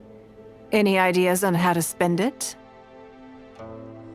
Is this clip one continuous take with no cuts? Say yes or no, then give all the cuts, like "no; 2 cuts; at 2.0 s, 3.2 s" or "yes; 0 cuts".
yes; 0 cuts